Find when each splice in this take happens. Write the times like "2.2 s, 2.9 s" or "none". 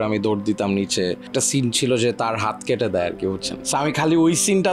1.3 s, 3.5 s

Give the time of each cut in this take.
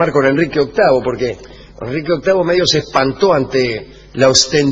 2.6 s

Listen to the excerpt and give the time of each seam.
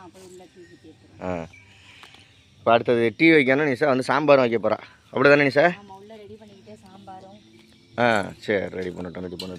none

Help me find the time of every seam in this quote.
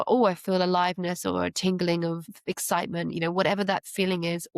2.3 s

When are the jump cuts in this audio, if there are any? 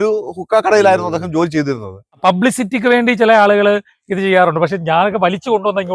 2.0 s

